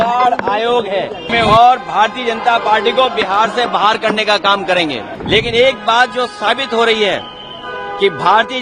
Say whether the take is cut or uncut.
cut